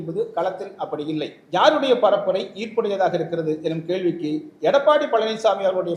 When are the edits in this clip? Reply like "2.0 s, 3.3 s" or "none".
1.4 s